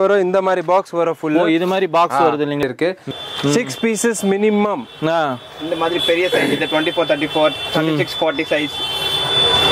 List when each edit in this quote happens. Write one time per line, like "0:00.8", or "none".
0:03.0